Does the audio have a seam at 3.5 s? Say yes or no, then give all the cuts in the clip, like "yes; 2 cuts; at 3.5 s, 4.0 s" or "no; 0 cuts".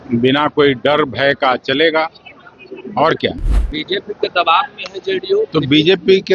yes; 1 cut; at 3.5 s